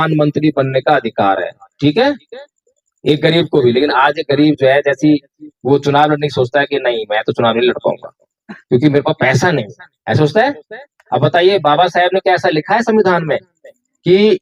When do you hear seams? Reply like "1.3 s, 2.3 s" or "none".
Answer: none